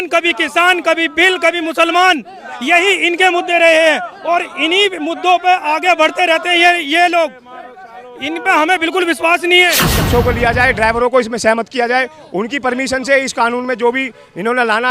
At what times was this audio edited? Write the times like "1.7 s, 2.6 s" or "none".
10.0 s